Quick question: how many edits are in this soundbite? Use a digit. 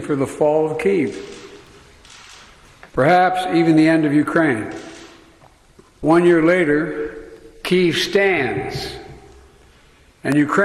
2